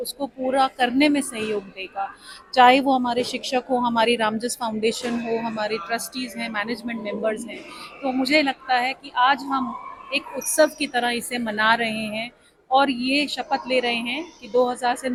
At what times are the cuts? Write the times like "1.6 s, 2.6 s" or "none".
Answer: none